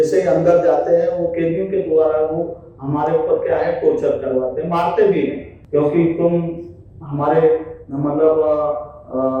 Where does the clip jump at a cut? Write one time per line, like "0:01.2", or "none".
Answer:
0:05.5